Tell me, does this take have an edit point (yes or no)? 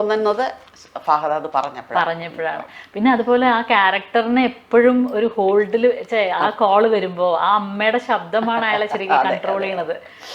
no